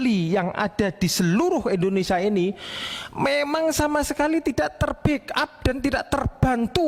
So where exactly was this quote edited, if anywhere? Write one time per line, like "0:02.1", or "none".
none

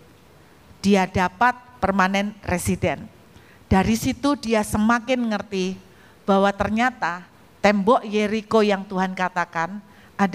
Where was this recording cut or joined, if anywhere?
none

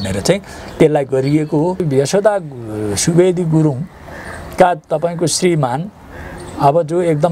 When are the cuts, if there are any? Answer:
0:01.9

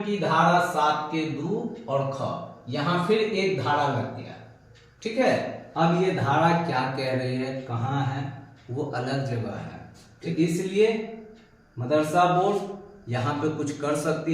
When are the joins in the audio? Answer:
0:05.6
0:10.3

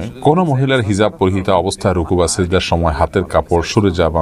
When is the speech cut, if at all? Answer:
none

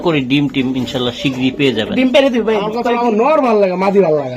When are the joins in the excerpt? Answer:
0:02.8

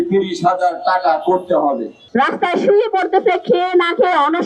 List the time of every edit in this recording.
0:02.0

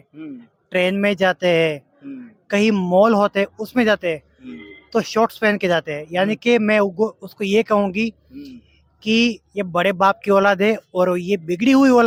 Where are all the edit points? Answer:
none

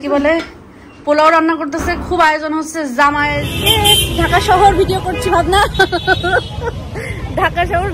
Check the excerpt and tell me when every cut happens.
0:03.5

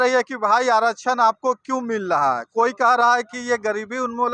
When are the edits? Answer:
none

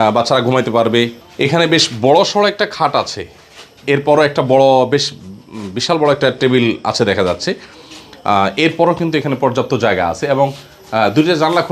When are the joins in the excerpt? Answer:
0:01.2

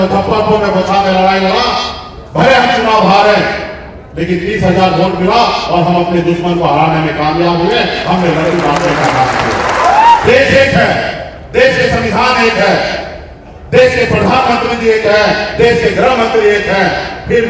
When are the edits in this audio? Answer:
0:10.2

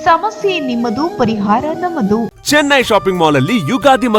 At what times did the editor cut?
0:02.3

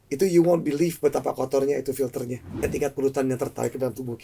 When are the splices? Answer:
0:02.6

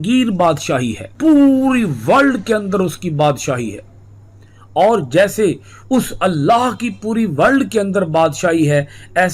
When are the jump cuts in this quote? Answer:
0:01.0

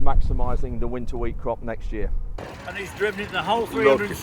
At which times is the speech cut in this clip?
0:02.4

